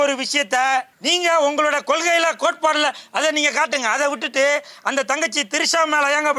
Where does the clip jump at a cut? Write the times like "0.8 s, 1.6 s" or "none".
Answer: 1.0 s